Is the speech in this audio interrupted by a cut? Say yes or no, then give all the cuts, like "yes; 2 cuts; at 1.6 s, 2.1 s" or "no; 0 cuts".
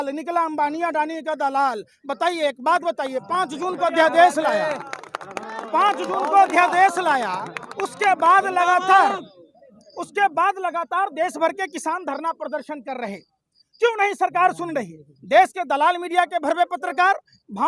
no; 0 cuts